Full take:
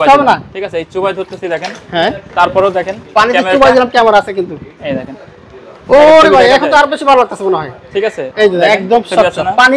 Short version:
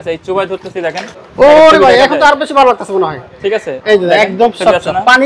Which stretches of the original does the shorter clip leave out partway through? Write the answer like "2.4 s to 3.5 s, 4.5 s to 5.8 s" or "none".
1.8 s to 5.6 s